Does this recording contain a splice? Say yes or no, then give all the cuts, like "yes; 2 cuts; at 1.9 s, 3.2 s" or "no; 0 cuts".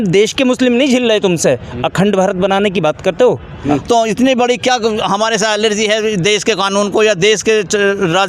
yes; 1 cut; at 3.5 s